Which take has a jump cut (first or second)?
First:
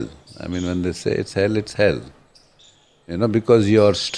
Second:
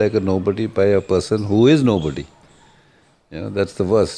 second